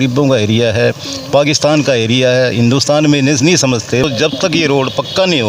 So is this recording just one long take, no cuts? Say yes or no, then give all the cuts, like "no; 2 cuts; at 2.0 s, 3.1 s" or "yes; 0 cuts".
no; 1 cut; at 4.0 s